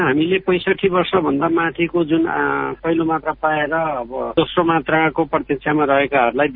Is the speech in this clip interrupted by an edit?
yes; 1 cut; at 2.8 s

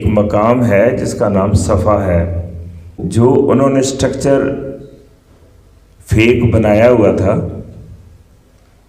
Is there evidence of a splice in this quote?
yes; 1 cut; at 3.0 s

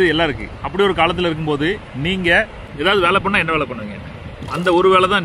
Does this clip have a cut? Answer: yes; 1 cut; at 2.6 s

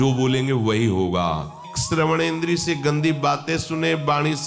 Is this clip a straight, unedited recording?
no; 1 cut; at 1.7 s

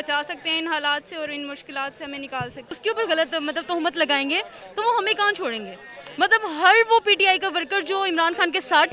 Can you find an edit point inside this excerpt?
yes; 1 cut; at 2.7 s

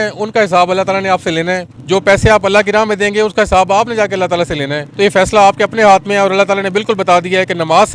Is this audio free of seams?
no; 2 cuts; at 1.7 s, 4.8 s

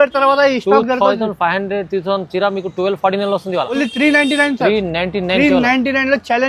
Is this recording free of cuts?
no; 1 cut; at 3.7 s

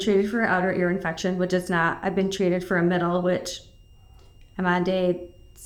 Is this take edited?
no; 0 cuts

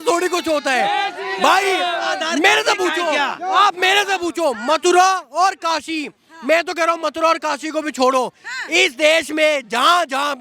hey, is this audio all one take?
yes; 0 cuts

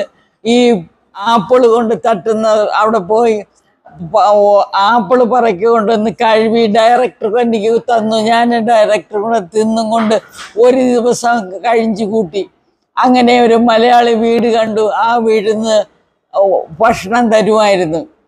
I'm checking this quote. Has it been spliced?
yes; 1 cut; at 1.3 s

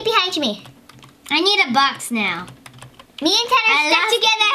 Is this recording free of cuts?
yes; 0 cuts

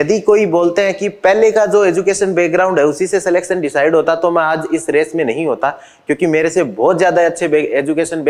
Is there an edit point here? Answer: no; 0 cuts

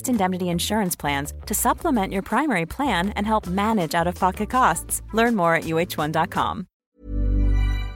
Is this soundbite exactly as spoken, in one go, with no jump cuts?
no; 1 cut; at 6.9 s

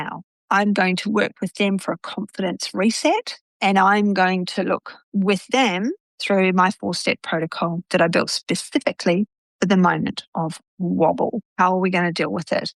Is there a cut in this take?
yes; 1 cut; at 11.4 s

